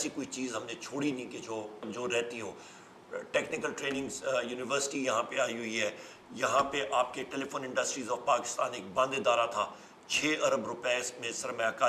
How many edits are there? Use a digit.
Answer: 1